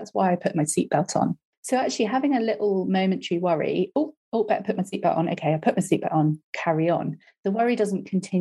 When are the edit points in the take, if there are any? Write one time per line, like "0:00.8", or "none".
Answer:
0:01.5